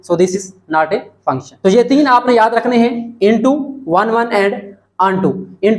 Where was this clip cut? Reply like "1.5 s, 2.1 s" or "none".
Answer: 1.5 s